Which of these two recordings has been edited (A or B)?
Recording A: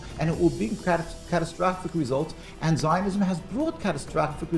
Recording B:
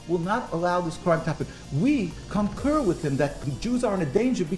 B